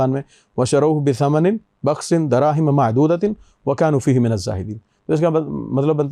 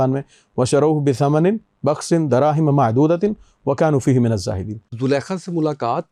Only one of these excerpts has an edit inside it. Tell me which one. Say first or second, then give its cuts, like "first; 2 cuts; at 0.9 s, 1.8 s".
second; 1 cut; at 5.0 s